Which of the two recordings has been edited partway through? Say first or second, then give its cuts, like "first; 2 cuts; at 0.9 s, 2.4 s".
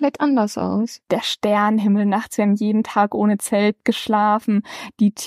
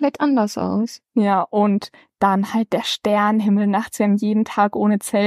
first; 1 cut; at 1.1 s